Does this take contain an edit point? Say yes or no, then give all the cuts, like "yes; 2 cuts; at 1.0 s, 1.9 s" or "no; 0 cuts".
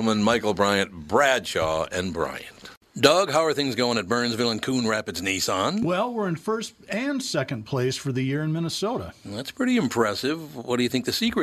yes; 1 cut; at 2.7 s